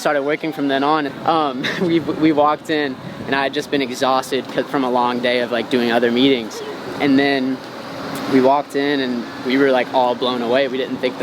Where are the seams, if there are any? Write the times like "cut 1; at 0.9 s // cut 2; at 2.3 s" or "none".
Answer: cut 1; at 1.1 s